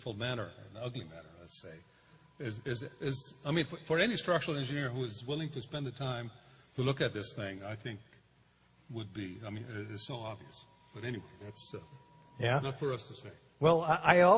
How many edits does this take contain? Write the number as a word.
one